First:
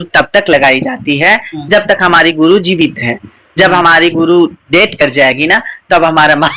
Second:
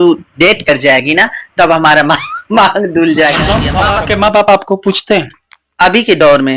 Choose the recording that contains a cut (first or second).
second